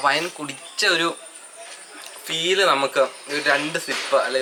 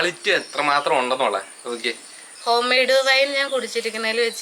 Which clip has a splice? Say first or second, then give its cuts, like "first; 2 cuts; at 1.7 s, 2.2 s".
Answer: second; 1 cut; at 2.3 s